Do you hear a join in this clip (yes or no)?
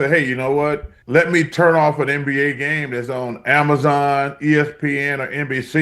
yes